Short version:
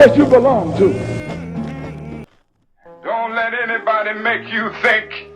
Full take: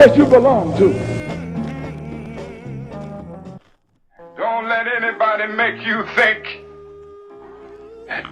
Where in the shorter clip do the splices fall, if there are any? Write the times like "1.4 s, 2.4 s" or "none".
2.3 s